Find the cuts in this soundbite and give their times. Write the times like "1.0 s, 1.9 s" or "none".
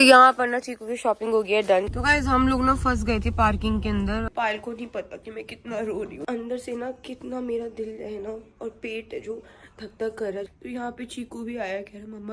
1.9 s, 4.3 s, 6.2 s, 10.5 s